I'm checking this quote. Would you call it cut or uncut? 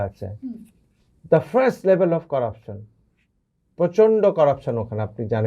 uncut